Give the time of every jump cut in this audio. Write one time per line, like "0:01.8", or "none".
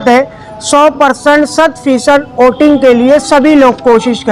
none